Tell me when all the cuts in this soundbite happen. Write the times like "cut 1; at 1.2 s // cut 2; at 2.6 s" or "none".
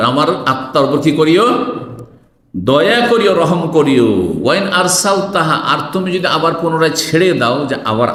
none